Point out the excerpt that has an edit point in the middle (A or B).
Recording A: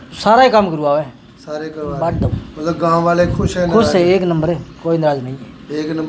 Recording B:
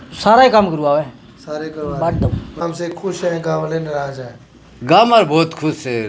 B